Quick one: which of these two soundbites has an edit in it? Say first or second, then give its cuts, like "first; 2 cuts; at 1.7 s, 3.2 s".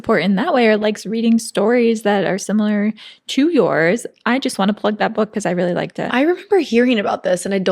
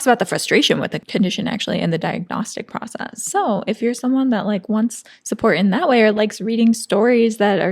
second; 1 cut; at 1.0 s